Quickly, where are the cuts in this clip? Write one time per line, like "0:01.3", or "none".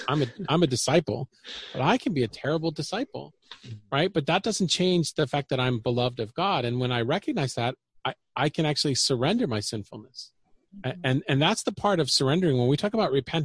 0:10.7